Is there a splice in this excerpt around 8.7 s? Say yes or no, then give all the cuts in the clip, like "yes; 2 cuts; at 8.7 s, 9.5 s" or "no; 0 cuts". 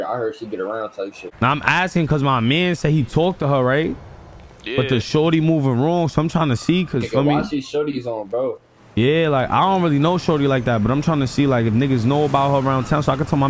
no; 1 cut; at 1.2 s